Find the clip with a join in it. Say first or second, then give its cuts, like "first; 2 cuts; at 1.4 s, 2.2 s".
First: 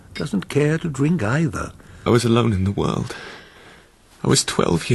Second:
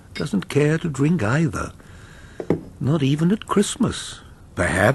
second; 1 cut; at 2.1 s